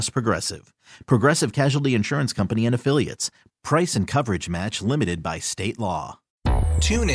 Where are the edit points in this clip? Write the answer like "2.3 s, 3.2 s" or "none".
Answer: 6.2 s